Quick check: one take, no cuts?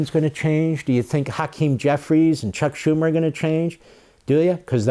yes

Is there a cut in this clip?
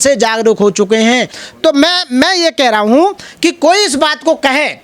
no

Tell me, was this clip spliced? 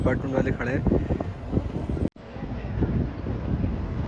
no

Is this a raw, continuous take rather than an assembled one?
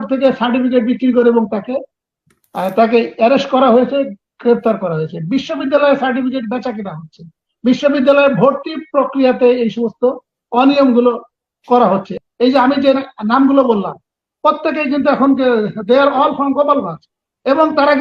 no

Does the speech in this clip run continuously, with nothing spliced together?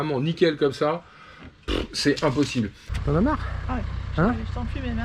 no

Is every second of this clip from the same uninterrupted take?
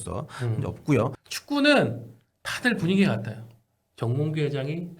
no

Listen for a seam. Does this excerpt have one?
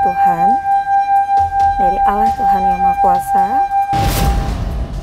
yes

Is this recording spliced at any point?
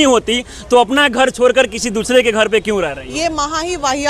no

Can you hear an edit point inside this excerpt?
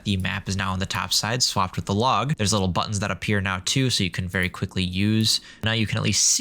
yes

